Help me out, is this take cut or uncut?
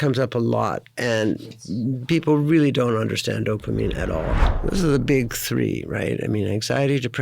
cut